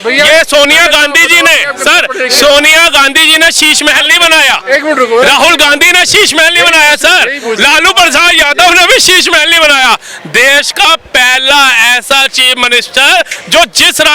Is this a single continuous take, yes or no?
yes